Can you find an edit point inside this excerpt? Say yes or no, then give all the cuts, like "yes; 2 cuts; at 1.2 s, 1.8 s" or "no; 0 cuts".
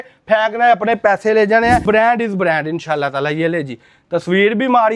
yes; 1 cut; at 1.8 s